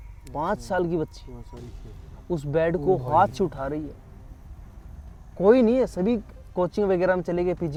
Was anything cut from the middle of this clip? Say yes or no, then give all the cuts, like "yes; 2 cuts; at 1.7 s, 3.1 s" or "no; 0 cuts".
no; 0 cuts